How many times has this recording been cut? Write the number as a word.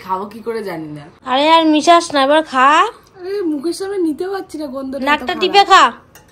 one